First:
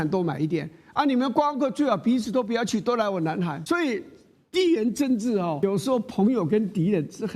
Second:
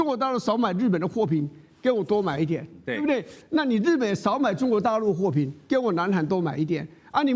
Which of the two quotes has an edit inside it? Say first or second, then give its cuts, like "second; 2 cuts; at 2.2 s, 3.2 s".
first; 2 cuts; at 3.6 s, 5.6 s